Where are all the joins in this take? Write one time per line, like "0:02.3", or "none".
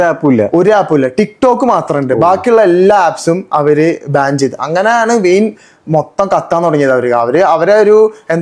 none